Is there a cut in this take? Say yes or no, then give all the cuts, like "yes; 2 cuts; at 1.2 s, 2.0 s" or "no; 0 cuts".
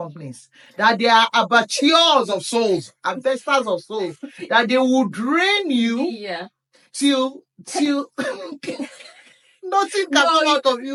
no; 0 cuts